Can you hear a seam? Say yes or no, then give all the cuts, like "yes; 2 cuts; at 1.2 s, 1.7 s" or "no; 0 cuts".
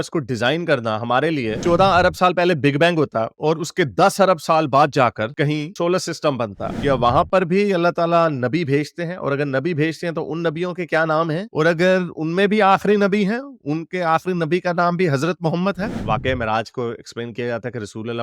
yes; 3 cuts; at 1.5 s, 6.7 s, 15.9 s